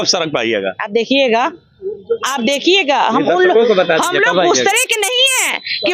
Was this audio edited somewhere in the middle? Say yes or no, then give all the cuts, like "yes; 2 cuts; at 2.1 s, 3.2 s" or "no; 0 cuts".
no; 0 cuts